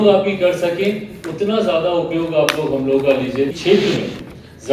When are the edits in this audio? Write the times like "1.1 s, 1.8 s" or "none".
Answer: 3.6 s